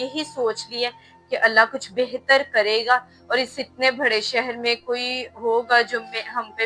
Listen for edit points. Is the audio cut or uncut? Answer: uncut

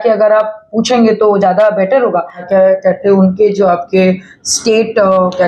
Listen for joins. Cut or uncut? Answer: cut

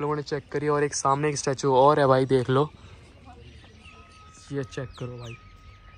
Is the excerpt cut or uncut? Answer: uncut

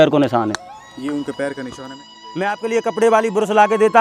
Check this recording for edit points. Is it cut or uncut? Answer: cut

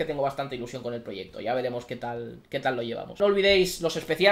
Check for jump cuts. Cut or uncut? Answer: cut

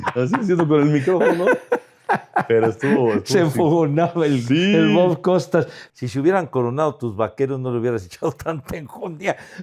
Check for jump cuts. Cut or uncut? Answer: cut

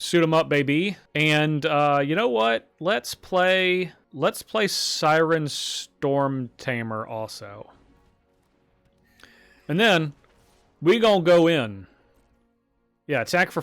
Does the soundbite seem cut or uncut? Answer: cut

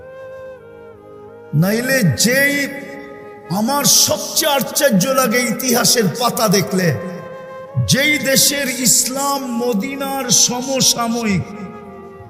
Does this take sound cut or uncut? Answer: uncut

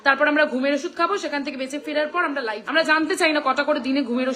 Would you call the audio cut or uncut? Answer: cut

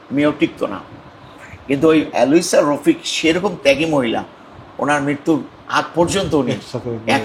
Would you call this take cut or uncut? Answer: uncut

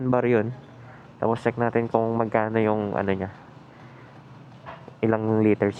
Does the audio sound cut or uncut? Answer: uncut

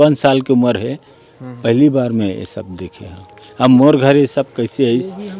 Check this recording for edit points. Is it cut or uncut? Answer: uncut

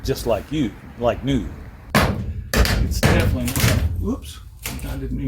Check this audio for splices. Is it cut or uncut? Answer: cut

